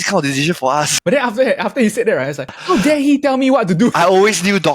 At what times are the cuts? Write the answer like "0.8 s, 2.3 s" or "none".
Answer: 0.9 s, 2.6 s, 3.9 s